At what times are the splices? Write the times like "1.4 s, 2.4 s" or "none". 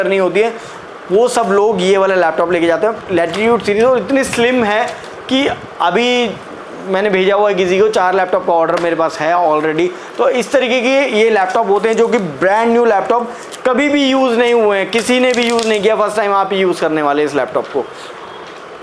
none